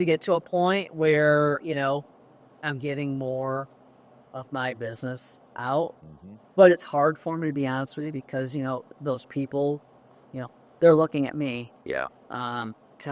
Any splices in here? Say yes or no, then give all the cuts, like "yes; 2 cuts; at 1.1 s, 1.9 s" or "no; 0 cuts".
no; 0 cuts